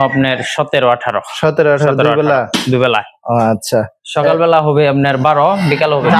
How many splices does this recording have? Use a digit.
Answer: 0